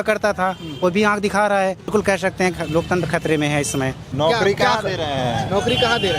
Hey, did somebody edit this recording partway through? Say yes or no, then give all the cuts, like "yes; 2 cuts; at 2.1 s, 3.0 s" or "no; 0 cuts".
yes; 2 cuts; at 1.9 s, 4.0 s